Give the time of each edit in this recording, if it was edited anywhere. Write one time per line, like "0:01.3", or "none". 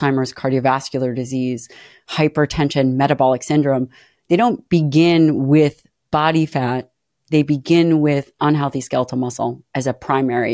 none